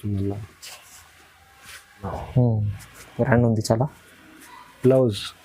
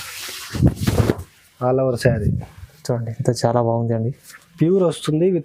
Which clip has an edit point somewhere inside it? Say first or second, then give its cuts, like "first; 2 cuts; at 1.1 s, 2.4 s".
first; 1 cut; at 2.1 s